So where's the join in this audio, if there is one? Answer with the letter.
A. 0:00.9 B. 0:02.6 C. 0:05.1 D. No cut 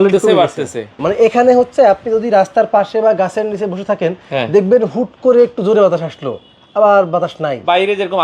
A